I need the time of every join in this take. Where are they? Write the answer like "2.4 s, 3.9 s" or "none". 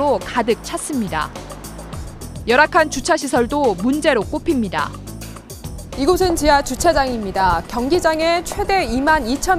none